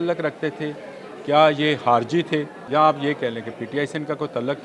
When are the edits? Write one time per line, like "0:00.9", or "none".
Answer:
0:02.6